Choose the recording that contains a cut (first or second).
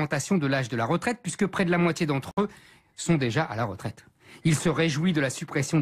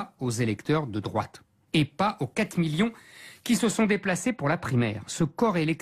second